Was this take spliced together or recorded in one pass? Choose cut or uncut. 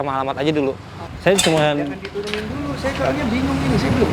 cut